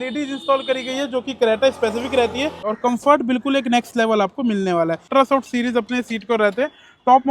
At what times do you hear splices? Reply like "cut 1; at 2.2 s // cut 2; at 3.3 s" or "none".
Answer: cut 1; at 2.6 s // cut 2; at 5.1 s

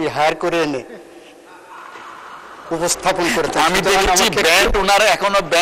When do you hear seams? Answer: none

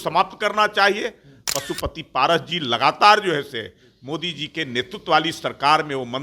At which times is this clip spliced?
cut 1; at 1.3 s

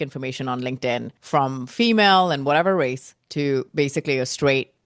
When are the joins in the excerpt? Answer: cut 1; at 1.2 s

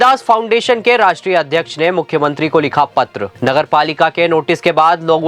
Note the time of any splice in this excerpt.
cut 1; at 3.3 s

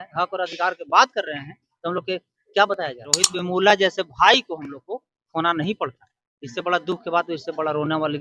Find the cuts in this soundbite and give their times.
cut 1; at 3.3 s

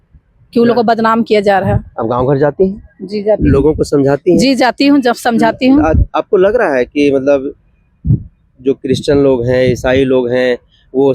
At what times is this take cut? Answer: cut 1; at 1.9 s

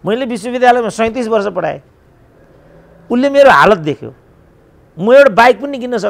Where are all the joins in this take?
none

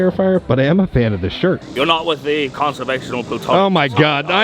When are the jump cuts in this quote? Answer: cut 1; at 1.6 s

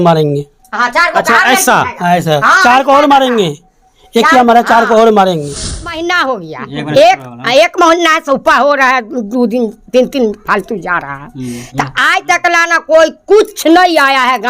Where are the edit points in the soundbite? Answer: cut 1; at 6.0 s

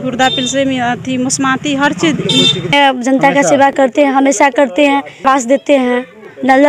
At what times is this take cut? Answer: cut 1; at 2.7 s // cut 2; at 5.2 s

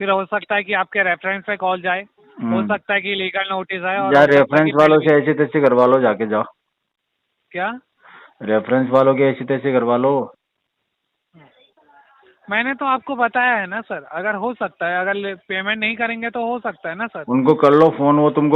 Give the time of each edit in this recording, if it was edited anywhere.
none

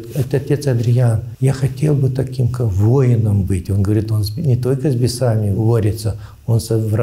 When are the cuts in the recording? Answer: cut 1; at 1.3 s // cut 2; at 5.6 s

